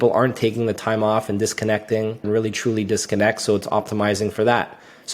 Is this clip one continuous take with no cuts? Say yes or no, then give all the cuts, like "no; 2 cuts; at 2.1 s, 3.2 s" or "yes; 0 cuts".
no; 1 cut; at 2.3 s